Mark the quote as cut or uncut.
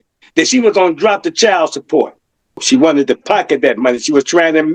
cut